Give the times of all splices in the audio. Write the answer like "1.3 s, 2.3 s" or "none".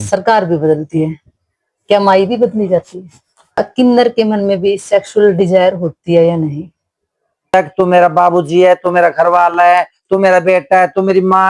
3.6 s, 7.5 s

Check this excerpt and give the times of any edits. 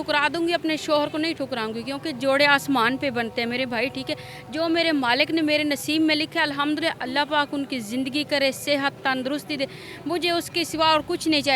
none

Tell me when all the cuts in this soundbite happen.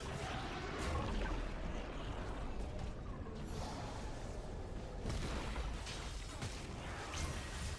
1.0 s, 2.3 s

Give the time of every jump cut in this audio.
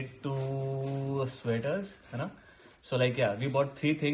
none

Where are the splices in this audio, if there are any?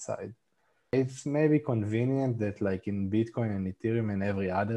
0.9 s

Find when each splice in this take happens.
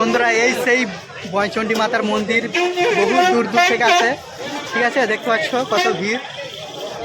none

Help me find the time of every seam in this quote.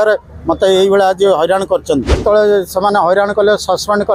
2.2 s

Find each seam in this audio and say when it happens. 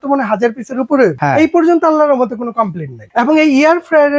1.2 s, 3.0 s

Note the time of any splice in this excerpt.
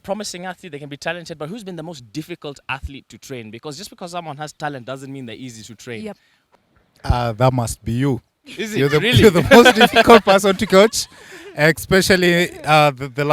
6.4 s

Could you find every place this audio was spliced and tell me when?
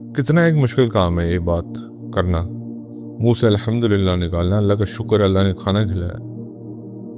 5.9 s

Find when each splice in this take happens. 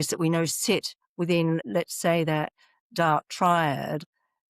1.7 s

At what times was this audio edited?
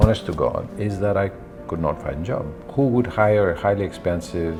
none

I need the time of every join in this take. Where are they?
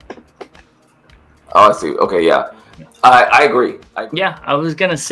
3.8 s

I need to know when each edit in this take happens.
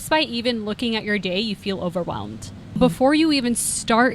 2.8 s

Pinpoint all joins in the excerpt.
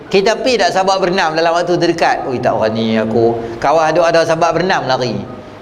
none

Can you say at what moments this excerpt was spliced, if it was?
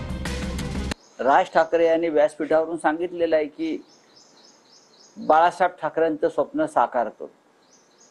1.0 s

